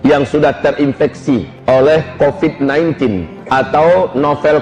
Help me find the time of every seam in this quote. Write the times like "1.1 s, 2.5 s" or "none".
1.5 s, 3.3 s